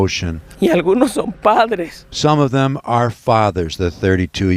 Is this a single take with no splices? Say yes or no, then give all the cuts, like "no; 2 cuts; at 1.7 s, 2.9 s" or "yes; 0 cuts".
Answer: yes; 0 cuts